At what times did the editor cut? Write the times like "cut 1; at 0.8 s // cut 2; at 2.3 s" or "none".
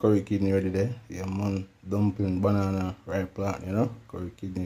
none